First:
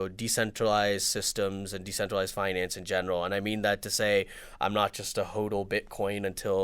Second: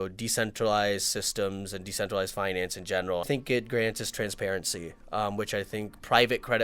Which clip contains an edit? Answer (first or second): second